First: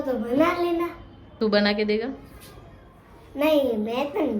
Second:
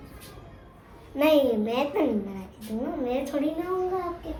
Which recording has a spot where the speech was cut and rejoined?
first; 1 cut; at 1.2 s

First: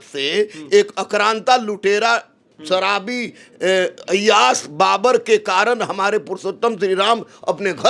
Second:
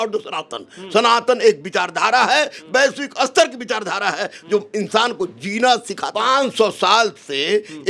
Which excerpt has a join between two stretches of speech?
second; 1 cut; at 6.0 s

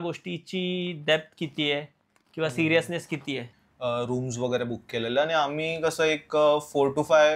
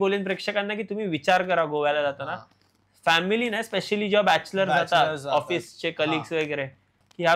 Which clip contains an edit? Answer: first; 1 cut; at 3.6 s

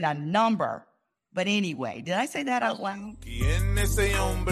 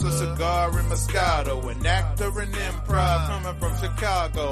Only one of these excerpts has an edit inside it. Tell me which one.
first; 1 cut; at 3.4 s

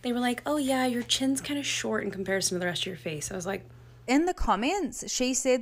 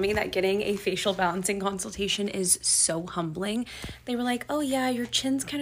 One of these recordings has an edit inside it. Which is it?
first; 1 cut; at 4.0 s

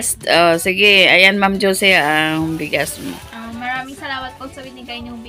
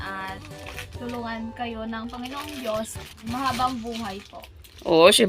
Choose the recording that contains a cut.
second; 1 cut; at 3.2 s

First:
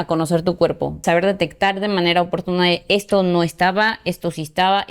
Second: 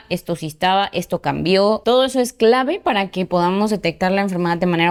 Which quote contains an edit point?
first; 1 cut; at 1.0 s

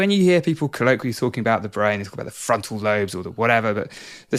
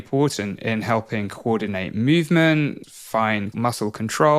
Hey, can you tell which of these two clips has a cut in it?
second; 1 cut; at 3.2 s

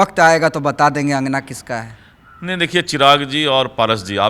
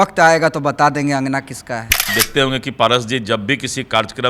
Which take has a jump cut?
second; 1 cut; at 2.2 s

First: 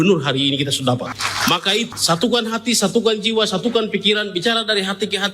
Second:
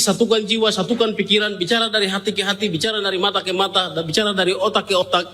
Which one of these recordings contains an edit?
first; 1 cut; at 1.7 s

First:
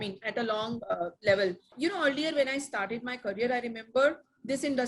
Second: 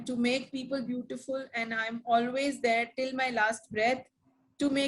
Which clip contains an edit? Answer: first; 1 cut; at 1.7 s

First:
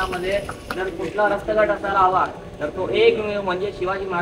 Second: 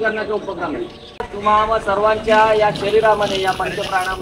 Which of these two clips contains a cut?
second; 1 cut; at 1.3 s

